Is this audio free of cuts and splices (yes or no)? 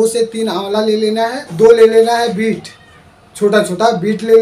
no